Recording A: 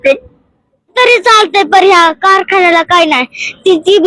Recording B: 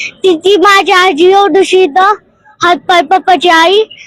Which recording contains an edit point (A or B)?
A